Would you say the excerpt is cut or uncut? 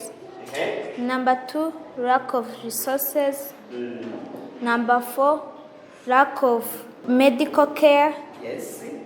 cut